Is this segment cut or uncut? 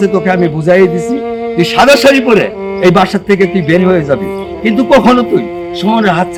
uncut